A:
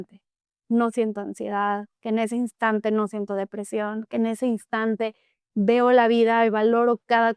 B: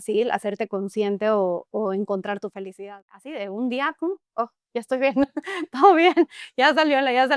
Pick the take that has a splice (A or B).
B